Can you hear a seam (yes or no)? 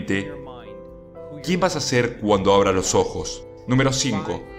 yes